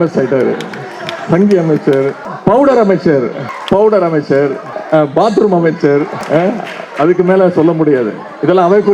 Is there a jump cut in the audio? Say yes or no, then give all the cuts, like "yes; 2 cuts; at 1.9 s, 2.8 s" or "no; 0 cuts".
yes; 4 cuts; at 2.3 s, 3.5 s, 4.7 s, 6.2 s